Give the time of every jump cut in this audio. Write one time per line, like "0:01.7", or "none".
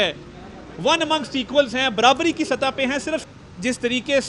0:03.3